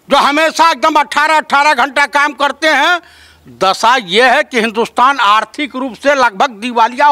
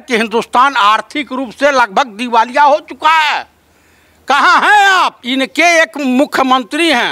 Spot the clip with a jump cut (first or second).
second